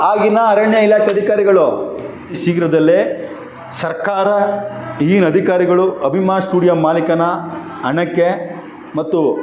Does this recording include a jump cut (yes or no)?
yes